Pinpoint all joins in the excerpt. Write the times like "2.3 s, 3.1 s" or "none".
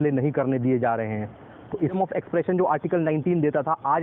1.9 s